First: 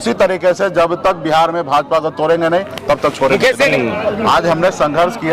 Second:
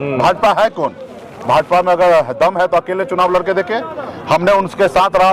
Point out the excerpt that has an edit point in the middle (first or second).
first